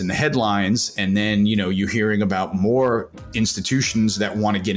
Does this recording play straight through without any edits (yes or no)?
yes